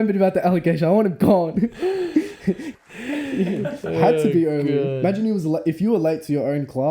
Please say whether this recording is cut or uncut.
cut